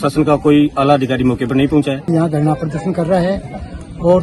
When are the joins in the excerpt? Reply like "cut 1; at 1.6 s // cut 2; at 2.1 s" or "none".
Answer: cut 1; at 2.1 s